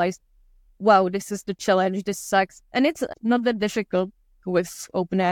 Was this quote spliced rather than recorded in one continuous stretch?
no; 0 cuts

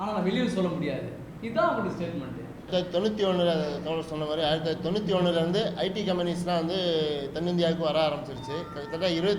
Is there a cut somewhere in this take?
yes; 1 cut; at 2.7 s

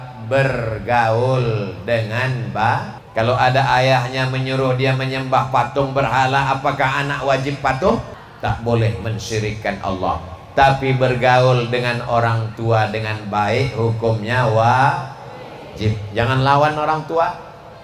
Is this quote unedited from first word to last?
no; 2 cuts; at 3.0 s, 8.2 s

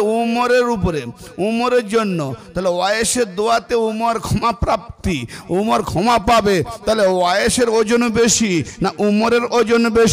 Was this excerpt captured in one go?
yes; 0 cuts

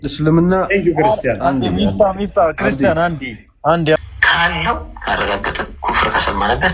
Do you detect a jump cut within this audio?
yes; 1 cut; at 4.0 s

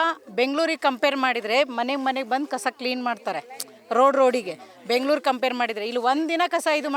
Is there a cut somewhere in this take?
no; 0 cuts

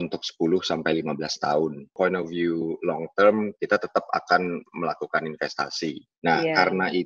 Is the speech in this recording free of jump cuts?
no; 2 cuts; at 2.0 s, 6.1 s

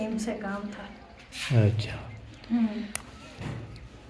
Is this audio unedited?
yes; 0 cuts

